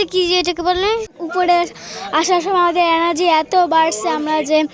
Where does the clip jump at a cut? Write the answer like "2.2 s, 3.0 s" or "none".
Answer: 1.1 s